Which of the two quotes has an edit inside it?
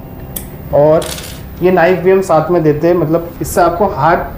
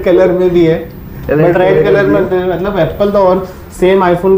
first; 1 cut; at 3.3 s

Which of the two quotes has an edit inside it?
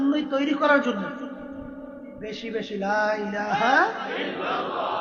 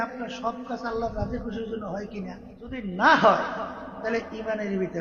second; 1 cut; at 2.8 s

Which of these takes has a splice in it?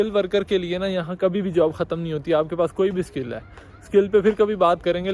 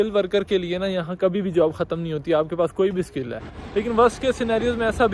second; 1 cut; at 3.5 s

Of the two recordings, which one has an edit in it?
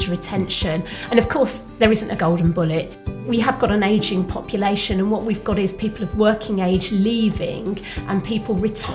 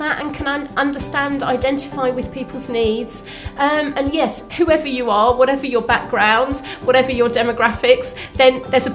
first; 1 cut; at 3.2 s

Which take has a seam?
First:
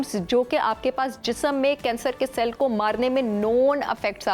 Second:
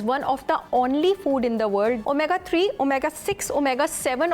second; 1 cut; at 2.0 s

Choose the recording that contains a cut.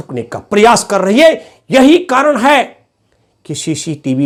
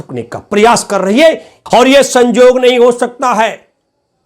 second; 1 cut; at 1.5 s

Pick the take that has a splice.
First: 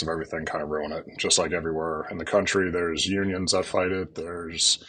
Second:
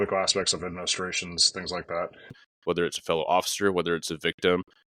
second; 1 cut; at 2.4 s

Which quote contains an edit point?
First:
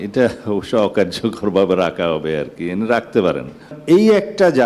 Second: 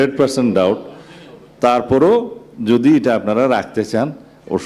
first; 1 cut; at 3.8 s

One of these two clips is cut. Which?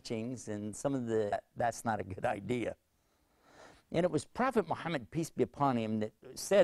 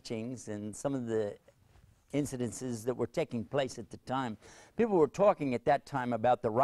second; 1 cut; at 1.3 s

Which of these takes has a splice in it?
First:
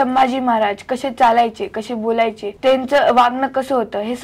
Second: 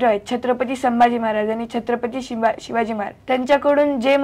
first; 1 cut; at 2.5 s

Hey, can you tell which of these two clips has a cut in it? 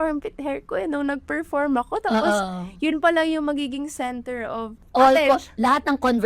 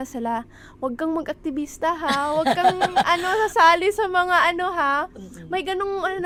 first; 1 cut; at 4.8 s

